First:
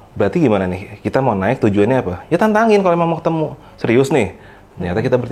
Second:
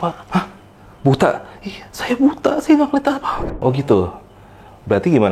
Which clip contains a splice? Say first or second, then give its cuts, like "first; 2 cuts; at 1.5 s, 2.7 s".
second; 1 cut; at 3.5 s